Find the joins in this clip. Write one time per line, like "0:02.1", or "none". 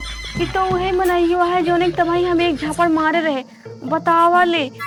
none